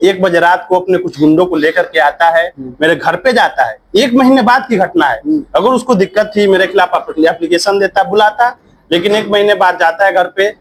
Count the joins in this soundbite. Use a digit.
0